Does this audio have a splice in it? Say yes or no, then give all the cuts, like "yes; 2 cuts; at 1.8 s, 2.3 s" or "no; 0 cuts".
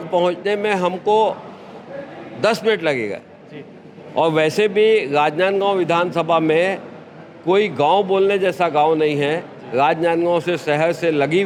no; 0 cuts